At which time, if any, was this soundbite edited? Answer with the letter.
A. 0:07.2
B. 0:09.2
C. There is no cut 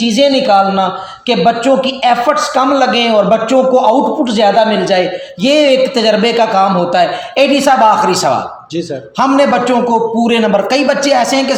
C